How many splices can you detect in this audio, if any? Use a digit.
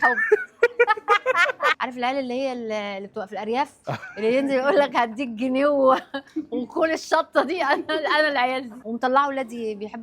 2